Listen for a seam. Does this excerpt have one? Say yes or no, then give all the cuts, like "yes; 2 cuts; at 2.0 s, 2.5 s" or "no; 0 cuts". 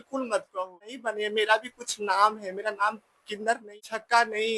yes; 2 cuts; at 1.0 s, 3.7 s